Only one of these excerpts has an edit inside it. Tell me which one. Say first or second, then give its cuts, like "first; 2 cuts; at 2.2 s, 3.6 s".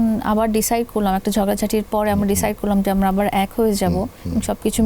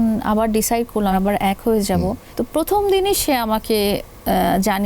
second; 2 cuts; at 1.2 s, 2.2 s